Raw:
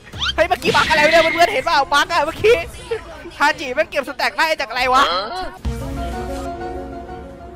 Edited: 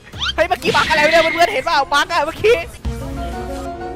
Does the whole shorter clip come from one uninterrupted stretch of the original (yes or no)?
no